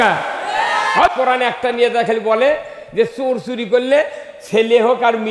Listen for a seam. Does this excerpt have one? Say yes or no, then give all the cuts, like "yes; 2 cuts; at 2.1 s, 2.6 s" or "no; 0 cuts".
yes; 1 cut; at 1.1 s